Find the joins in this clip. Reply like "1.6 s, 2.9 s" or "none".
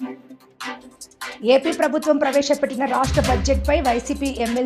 1.4 s